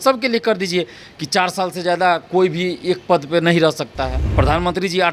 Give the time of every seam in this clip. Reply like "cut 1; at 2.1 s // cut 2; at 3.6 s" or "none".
cut 1; at 4.2 s

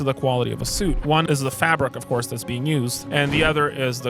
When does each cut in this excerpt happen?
cut 1; at 1.2 s // cut 2; at 3.0 s

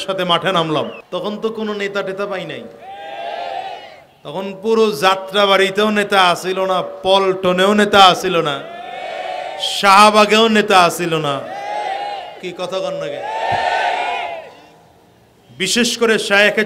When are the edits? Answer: cut 1; at 1.0 s

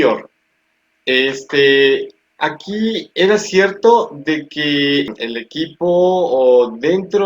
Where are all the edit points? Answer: cut 1; at 5.1 s

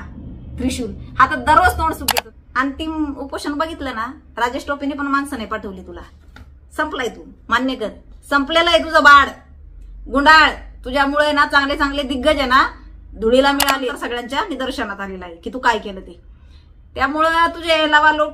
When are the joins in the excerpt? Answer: cut 1; at 2.0 s // cut 2; at 13.7 s

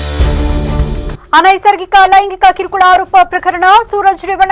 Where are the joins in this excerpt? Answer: cut 1; at 1.2 s

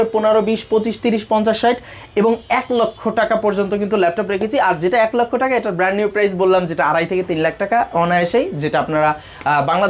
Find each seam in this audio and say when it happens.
none

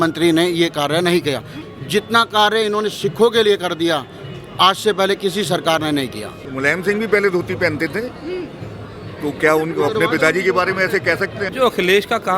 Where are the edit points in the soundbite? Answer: cut 1; at 1.5 s // cut 2; at 6.4 s // cut 3; at 11.4 s

